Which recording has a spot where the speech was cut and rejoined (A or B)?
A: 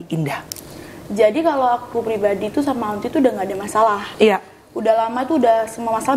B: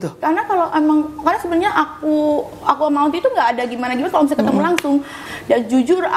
B